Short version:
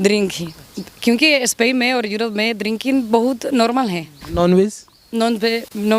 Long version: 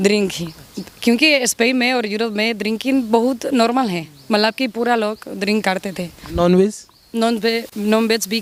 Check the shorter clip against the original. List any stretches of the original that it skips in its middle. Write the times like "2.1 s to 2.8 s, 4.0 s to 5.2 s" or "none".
4.1 s to 6.1 s